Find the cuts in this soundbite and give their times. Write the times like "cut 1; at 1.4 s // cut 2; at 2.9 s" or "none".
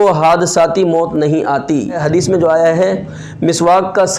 cut 1; at 2.0 s

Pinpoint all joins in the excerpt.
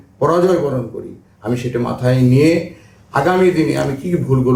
none

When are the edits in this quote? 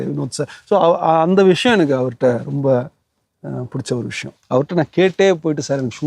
cut 1; at 4.3 s

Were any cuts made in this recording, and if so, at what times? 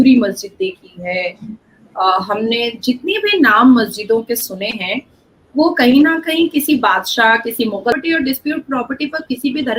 cut 1; at 7.9 s

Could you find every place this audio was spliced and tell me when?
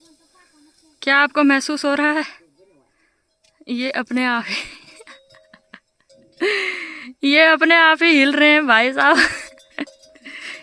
none

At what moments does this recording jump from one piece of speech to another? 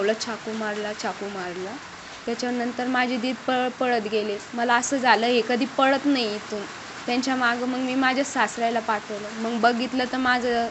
none

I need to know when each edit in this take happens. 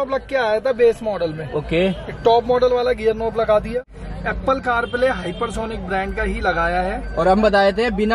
cut 1; at 3.8 s

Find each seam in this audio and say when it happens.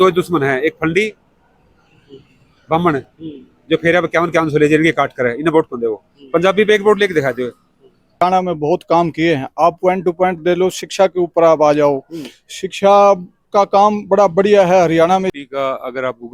cut 1; at 8.2 s // cut 2; at 15.3 s

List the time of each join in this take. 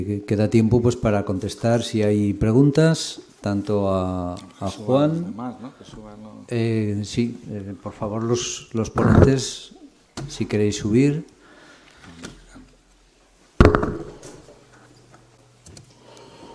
cut 1; at 15.6 s

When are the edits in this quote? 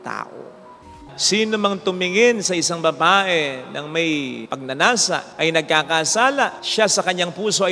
cut 1; at 0.9 s // cut 2; at 4.5 s // cut 3; at 5.3 s // cut 4; at 6.6 s

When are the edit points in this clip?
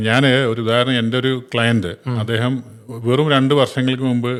none

